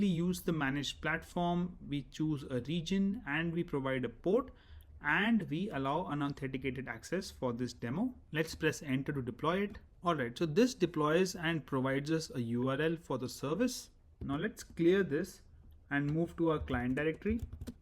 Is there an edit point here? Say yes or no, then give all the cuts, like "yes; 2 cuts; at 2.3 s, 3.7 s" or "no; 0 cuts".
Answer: yes; 1 cut; at 8.2 s